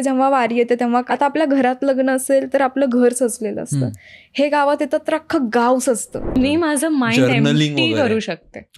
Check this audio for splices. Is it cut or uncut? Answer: cut